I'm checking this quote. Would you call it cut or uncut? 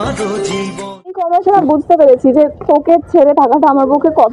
cut